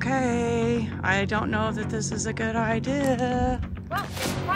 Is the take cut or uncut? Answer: uncut